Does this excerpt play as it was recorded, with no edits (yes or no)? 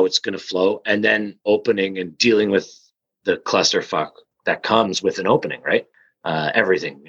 no